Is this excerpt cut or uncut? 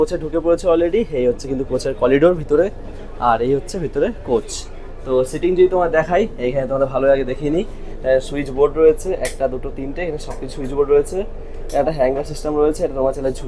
uncut